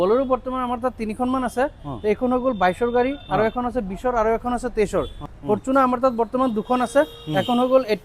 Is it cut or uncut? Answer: cut